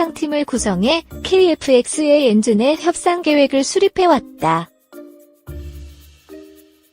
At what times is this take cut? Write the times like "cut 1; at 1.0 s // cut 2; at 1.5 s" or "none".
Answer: cut 1; at 4.8 s